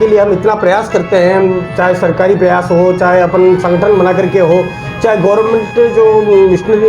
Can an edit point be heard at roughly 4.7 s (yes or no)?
no